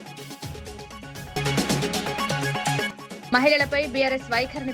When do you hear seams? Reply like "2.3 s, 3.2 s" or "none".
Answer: 1.2 s